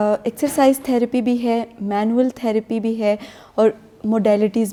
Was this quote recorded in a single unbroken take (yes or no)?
yes